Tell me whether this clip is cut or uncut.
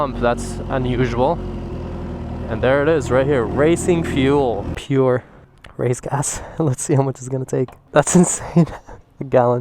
cut